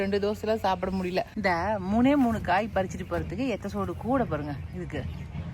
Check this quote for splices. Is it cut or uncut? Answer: cut